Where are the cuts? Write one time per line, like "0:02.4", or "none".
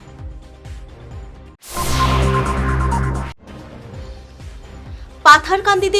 0:04.3